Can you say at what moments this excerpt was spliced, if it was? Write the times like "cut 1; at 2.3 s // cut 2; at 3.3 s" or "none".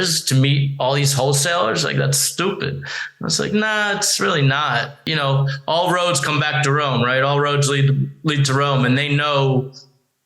cut 1; at 5.0 s